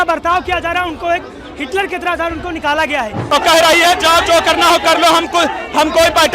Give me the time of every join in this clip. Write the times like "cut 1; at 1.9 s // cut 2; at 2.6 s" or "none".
cut 1; at 3.3 s